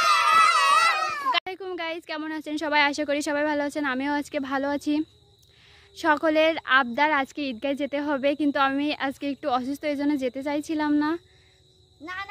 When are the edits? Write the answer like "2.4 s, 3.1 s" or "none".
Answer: 1.3 s